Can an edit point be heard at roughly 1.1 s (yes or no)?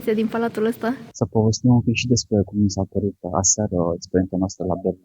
yes